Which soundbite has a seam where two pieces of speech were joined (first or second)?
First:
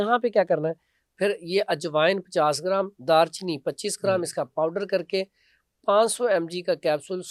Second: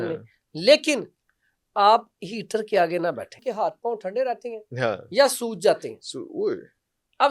second